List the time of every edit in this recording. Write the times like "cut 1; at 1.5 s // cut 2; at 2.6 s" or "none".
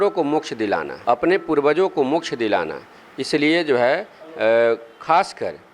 cut 1; at 0.9 s